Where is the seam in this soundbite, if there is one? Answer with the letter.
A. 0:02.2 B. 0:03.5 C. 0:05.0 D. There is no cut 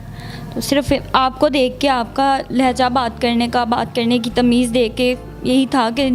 D